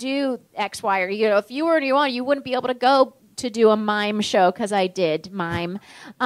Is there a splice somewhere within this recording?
yes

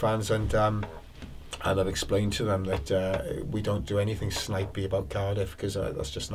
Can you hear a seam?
no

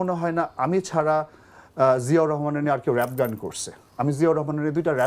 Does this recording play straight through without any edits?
yes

